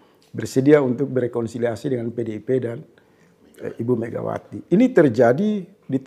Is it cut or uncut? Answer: uncut